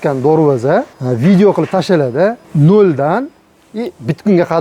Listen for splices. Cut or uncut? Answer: cut